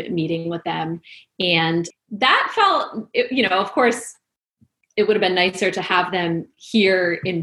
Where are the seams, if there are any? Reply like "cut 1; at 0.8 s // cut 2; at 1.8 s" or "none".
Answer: cut 1; at 1.9 s